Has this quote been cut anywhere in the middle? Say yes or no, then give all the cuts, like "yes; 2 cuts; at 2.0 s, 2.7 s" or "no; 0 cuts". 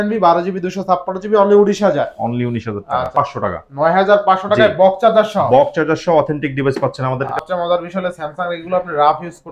yes; 2 cuts; at 3.1 s, 7.4 s